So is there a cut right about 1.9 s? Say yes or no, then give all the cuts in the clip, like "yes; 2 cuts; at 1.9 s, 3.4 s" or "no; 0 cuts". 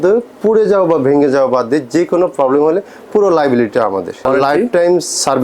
no; 1 cut; at 4.3 s